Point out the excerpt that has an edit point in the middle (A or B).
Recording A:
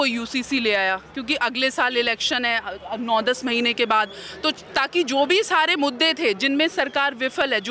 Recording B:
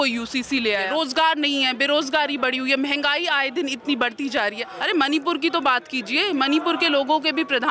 B